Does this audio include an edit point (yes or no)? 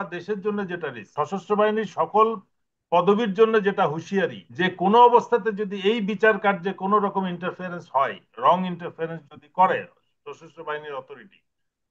yes